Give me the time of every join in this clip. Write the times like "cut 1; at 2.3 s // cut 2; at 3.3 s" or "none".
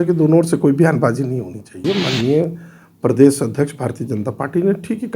cut 1; at 1.8 s

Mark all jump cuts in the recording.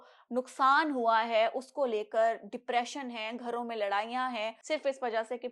cut 1; at 4.6 s

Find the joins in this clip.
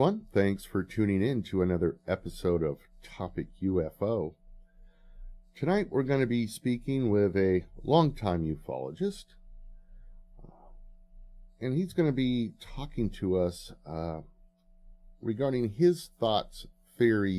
cut 1; at 11.0 s

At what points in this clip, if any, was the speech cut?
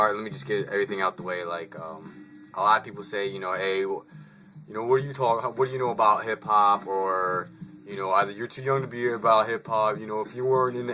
cut 1; at 2.2 s

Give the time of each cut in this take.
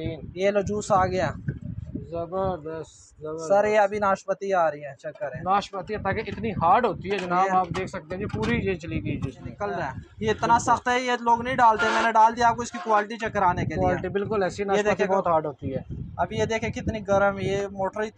cut 1; at 9.4 s

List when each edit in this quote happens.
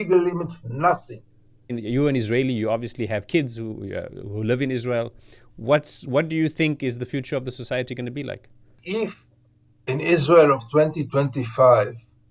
cut 1; at 1.8 s // cut 2; at 8.8 s

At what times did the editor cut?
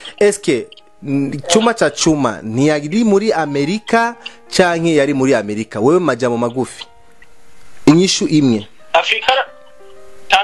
none

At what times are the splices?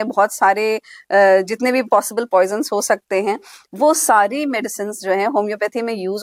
none

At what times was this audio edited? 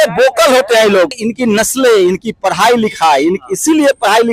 cut 1; at 1.2 s

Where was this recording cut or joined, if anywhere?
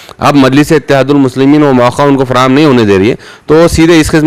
none

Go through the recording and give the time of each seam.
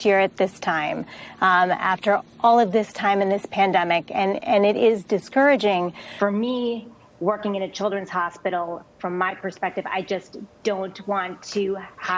cut 1; at 6.0 s

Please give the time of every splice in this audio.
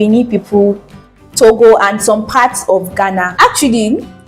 cut 1; at 3.3 s

